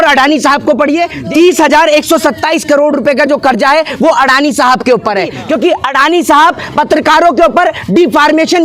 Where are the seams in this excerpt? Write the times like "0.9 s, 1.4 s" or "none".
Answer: 1.2 s, 5.4 s